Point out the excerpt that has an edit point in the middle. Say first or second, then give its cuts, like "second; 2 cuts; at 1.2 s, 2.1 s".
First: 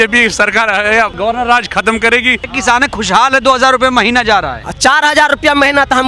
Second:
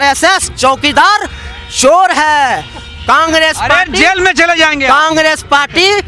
first; 2 cuts; at 1.1 s, 2.4 s